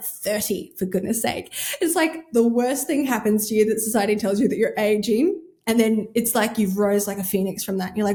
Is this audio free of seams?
yes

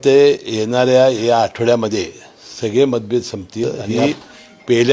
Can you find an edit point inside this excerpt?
yes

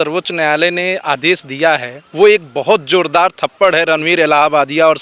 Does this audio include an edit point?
no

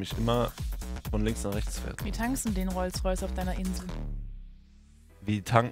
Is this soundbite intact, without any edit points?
yes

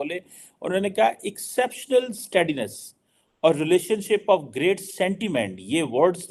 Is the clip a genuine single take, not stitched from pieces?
yes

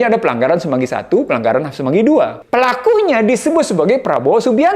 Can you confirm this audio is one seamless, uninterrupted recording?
no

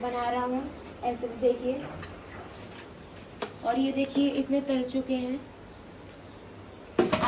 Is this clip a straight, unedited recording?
yes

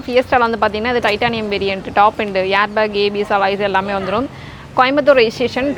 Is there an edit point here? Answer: no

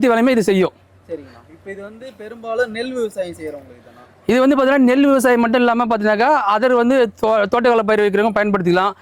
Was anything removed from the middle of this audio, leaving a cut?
no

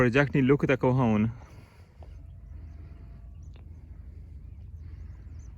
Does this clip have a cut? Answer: no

